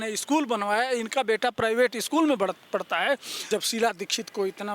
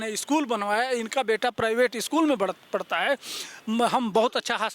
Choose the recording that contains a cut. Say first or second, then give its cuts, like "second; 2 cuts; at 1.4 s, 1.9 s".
first; 1 cut; at 3.3 s